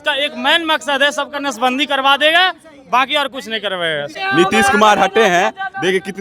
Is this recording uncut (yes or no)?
no